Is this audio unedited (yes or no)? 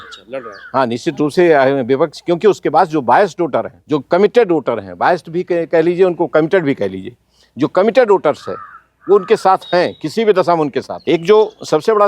no